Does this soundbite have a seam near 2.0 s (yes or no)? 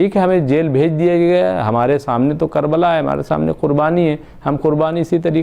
no